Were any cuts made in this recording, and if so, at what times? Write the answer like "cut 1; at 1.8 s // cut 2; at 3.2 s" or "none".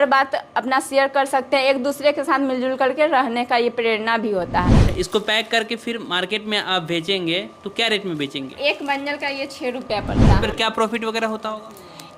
cut 1; at 4.8 s // cut 2; at 8.5 s // cut 3; at 10.4 s